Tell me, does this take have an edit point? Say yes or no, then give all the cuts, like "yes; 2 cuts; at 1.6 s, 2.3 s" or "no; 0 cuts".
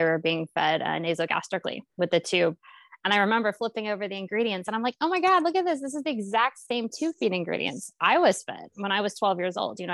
no; 0 cuts